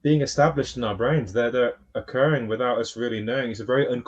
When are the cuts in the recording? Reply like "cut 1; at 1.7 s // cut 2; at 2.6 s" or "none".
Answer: none